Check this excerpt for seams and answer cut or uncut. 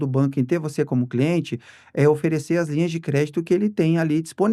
uncut